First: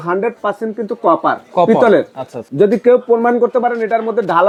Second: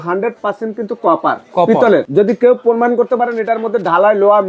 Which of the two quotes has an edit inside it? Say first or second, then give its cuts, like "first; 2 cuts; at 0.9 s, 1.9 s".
second; 1 cut; at 2.1 s